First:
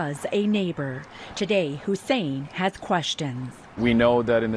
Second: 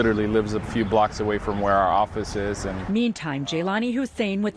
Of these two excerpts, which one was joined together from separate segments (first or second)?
first